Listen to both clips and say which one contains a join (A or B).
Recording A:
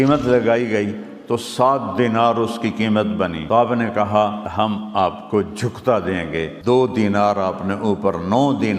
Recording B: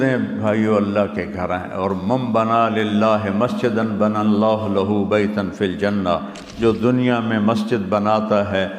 A